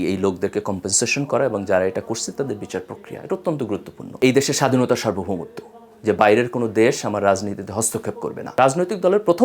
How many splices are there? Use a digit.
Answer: 2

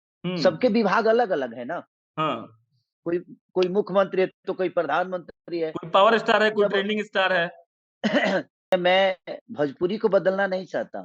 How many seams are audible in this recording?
1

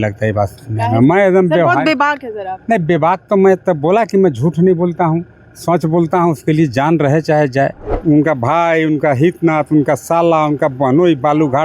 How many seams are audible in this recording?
1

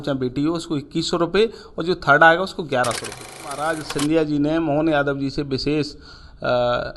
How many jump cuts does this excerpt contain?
1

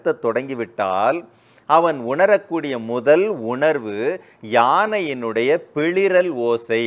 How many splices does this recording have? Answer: 0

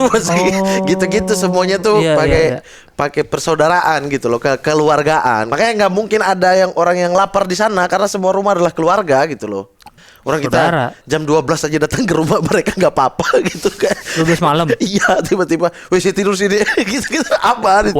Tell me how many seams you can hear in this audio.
2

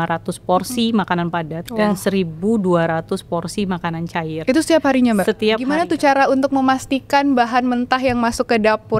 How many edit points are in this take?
2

